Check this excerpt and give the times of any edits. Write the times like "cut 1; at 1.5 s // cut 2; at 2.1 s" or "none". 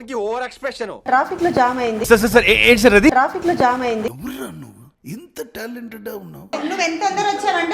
cut 1; at 1.1 s // cut 2; at 6.5 s